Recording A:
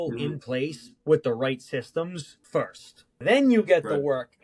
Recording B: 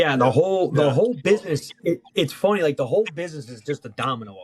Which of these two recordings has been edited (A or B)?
A